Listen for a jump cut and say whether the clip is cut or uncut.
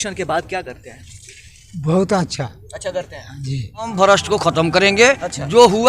cut